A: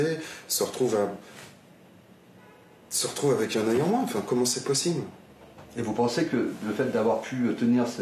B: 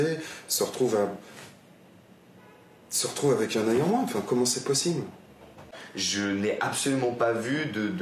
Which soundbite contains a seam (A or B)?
B